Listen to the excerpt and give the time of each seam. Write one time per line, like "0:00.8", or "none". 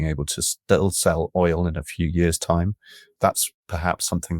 0:03.0